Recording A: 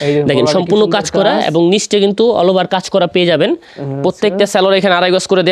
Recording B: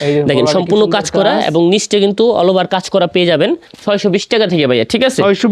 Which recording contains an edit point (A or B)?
B